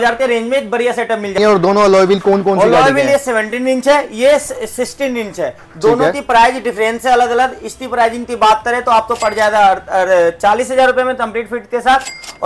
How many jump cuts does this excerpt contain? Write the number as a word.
one